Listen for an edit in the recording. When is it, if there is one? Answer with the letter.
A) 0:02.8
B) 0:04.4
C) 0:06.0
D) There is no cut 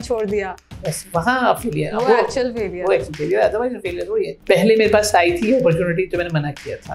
B